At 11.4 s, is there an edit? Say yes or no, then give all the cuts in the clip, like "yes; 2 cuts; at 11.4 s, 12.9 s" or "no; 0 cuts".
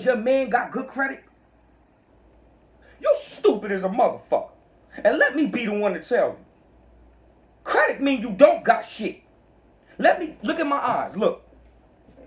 no; 0 cuts